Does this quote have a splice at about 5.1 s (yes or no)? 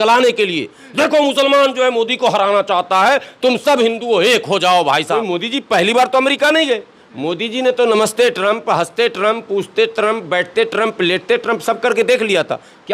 yes